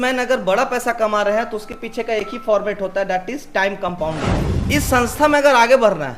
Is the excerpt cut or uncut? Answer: cut